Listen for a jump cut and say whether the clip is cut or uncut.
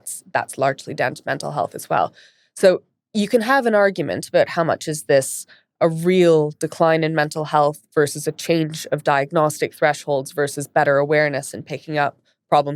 uncut